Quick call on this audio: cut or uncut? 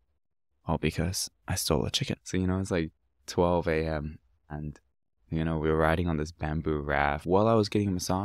cut